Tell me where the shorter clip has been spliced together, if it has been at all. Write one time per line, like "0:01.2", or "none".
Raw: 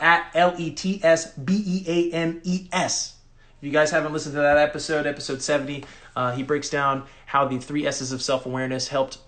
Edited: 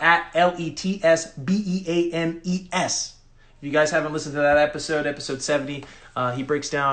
none